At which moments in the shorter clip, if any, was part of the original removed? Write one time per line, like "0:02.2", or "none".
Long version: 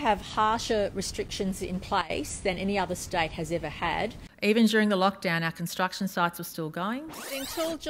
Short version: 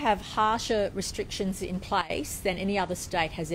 none